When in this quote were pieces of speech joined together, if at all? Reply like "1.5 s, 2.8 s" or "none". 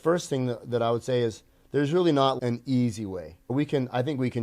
2.4 s, 3.5 s